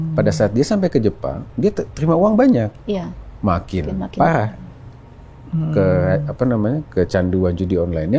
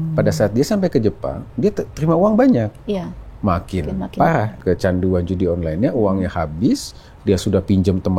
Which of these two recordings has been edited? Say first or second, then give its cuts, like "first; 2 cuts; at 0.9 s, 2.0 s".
second; 1 cut; at 4.6 s